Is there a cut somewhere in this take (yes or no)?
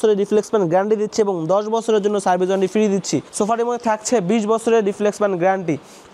yes